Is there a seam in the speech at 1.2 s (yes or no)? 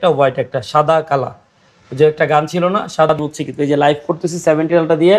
no